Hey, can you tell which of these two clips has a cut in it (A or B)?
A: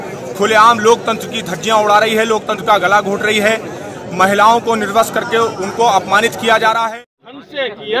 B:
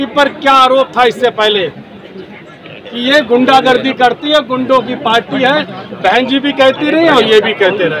A